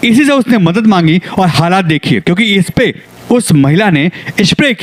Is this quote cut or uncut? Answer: uncut